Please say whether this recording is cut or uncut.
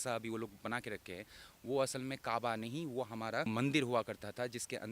cut